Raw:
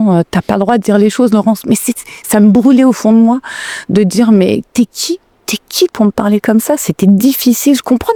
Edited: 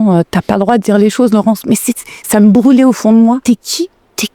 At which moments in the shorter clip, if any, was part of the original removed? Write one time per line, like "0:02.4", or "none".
0:03.4